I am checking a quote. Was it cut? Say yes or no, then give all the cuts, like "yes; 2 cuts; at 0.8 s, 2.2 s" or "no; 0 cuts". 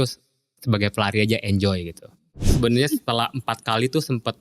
yes; 1 cut; at 2.5 s